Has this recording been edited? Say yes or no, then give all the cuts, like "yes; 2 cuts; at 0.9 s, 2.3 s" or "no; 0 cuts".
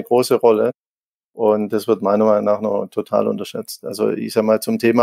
no; 0 cuts